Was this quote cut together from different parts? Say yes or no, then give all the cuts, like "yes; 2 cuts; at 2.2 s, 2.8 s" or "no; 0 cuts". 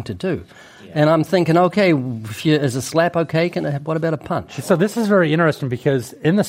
yes; 1 cut; at 4.5 s